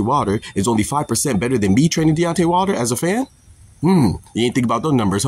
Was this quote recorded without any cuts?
no; 1 cut; at 3.3 s

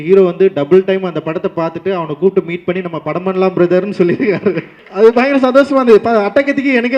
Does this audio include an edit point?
yes; 1 cut; at 4.8 s

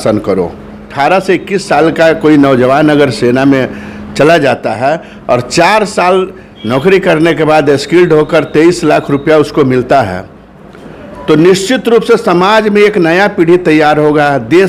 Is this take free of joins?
no; 1 cut; at 0.9 s

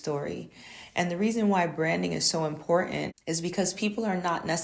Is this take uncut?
no; 1 cut; at 3.2 s

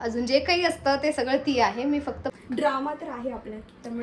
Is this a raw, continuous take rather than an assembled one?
no; 1 cut; at 2.2 s

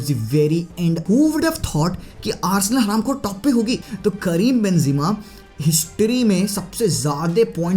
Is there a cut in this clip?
yes; 2 cuts; at 1.0 s, 3.8 s

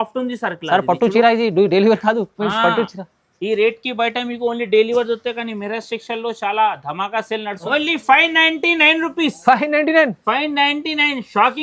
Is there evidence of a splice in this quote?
yes; 1 cut; at 7.6 s

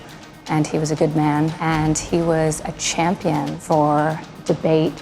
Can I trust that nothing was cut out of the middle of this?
no; 2 cuts; at 1.6 s, 3.6 s

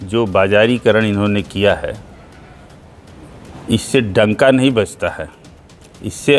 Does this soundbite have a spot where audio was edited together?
no; 0 cuts

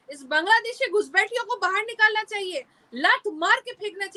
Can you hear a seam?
no; 0 cuts

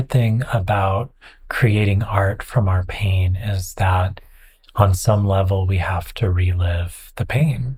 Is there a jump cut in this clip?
no; 0 cuts

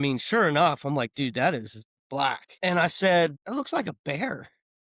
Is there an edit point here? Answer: yes; 2 cuts; at 2.5 s, 3.4 s

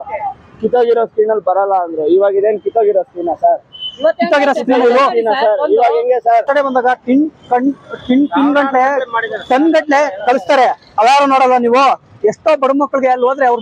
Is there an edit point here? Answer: yes; 1 cut; at 6.5 s

